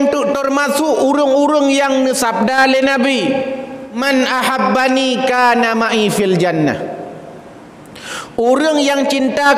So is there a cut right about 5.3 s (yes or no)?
no